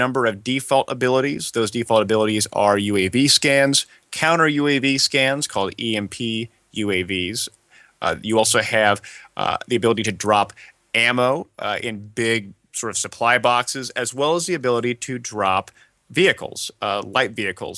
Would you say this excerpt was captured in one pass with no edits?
yes; 0 cuts

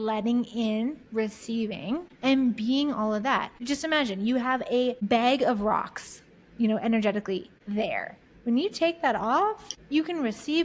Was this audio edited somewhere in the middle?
yes; 5 cuts; at 2.1 s, 3.6 s, 5.0 s, 7.5 s, 9.7 s

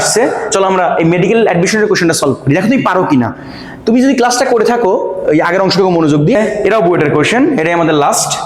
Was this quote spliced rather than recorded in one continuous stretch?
yes; 1 cut; at 6.4 s

